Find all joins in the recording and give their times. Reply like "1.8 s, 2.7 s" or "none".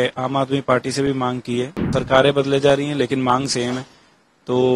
1.8 s